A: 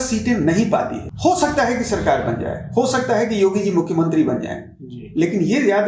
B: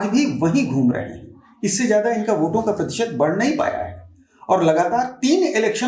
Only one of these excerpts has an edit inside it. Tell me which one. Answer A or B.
A